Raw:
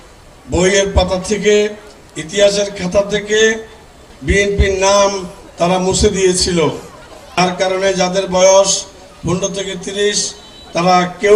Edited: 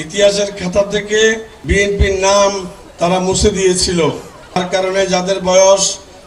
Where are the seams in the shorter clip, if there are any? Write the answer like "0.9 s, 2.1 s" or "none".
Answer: 1.5 s, 4.6 s